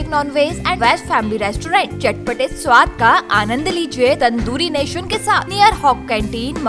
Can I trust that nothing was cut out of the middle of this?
no; 3 cuts; at 0.8 s, 4.2 s, 5.5 s

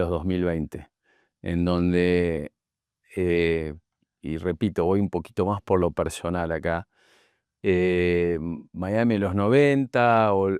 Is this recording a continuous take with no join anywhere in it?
yes; 0 cuts

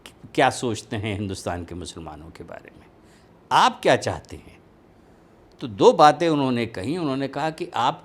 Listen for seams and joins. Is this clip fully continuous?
yes; 0 cuts

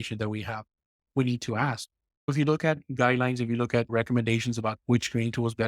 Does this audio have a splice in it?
yes; 1 cut; at 2.3 s

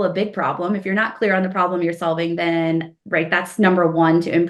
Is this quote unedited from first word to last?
yes; 0 cuts

